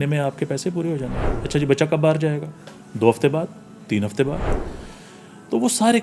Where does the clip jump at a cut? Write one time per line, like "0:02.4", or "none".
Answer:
none